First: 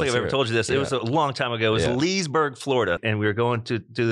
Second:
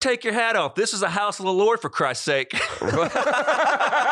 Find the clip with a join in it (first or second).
first